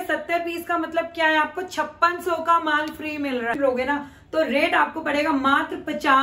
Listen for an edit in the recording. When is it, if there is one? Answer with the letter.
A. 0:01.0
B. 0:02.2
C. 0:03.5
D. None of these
C